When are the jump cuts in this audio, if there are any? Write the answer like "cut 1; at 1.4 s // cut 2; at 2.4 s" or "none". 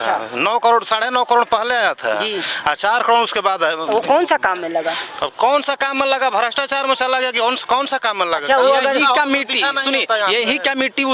none

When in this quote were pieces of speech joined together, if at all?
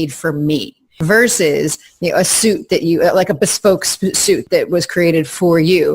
cut 1; at 1.0 s // cut 2; at 4.4 s

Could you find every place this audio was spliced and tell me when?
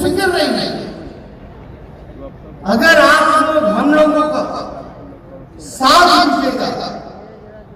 none

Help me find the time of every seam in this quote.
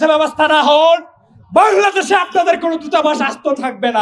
cut 1; at 1.7 s

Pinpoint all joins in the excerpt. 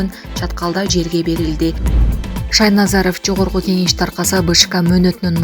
cut 1; at 1.9 s

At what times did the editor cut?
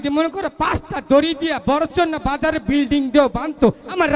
none

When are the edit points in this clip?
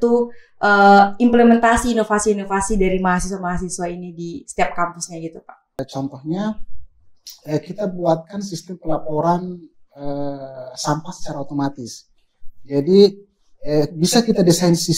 cut 1; at 5.8 s

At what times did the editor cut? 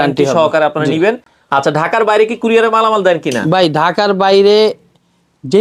none

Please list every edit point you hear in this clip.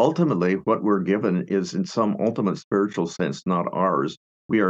none

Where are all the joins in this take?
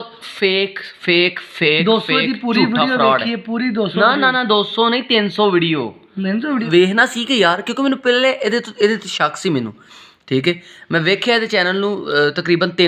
cut 1; at 6.6 s

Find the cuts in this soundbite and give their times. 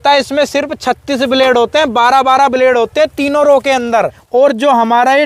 cut 1; at 4.2 s

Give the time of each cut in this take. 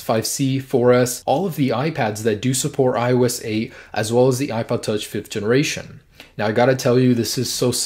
cut 1; at 3.2 s

